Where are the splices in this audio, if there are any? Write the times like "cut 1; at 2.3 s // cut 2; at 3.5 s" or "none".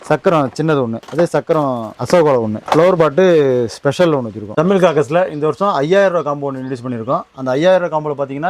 cut 1; at 4.4 s